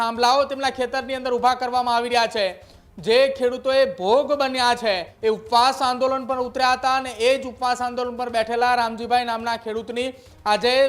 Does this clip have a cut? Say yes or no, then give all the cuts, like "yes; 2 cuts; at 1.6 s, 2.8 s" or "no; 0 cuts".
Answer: yes; 1 cut; at 5.1 s